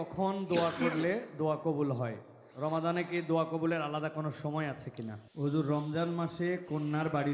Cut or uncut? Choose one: cut